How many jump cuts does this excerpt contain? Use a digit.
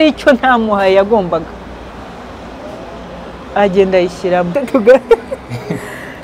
1